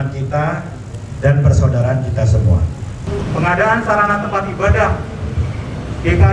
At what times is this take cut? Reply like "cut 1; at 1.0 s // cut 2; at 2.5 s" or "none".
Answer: cut 1; at 3.0 s